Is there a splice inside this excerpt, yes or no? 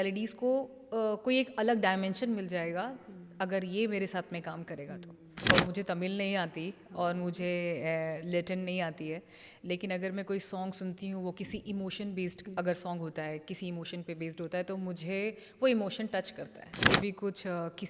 yes